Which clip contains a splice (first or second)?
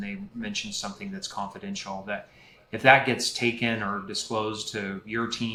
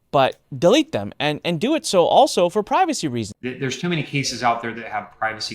second